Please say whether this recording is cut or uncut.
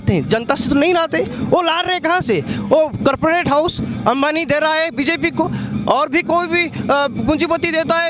uncut